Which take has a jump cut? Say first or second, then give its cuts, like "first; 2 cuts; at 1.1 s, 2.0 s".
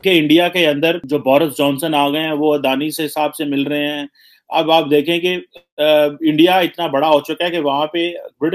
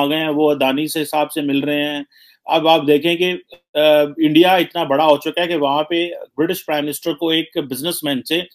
first; 1 cut; at 1.0 s